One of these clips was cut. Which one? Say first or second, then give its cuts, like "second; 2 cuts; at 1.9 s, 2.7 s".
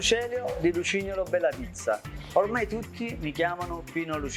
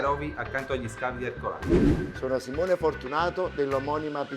second; 2 cuts; at 1.6 s, 2.1 s